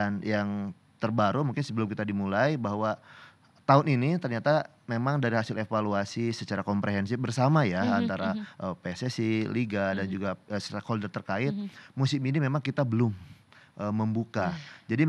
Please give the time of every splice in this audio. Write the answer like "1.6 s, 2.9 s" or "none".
none